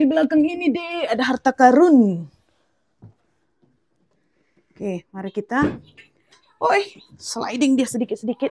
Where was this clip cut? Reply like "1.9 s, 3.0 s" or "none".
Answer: none